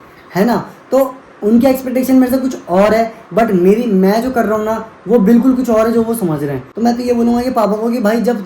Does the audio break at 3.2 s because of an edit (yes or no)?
no